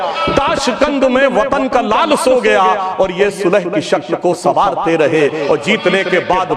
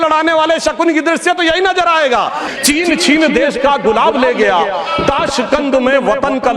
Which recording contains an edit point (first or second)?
second